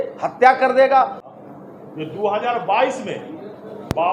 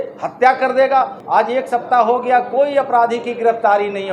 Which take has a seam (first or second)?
second